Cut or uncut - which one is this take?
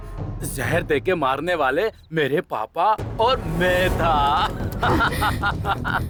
uncut